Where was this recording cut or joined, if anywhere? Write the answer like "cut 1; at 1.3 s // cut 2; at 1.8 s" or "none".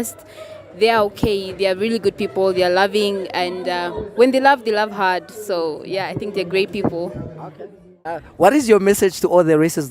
cut 1; at 8.0 s